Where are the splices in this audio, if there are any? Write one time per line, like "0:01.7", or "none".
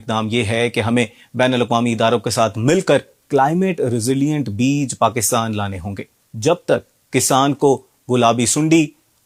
none